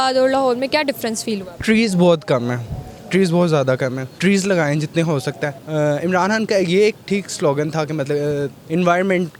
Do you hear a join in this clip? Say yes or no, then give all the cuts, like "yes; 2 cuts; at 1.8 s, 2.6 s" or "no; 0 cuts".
yes; 3 cuts; at 4.1 s, 5.6 s, 8.6 s